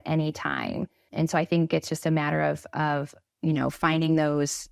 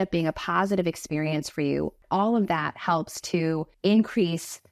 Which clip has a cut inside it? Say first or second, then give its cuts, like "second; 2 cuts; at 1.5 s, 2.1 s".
second; 2 cuts; at 2.0 s, 3.7 s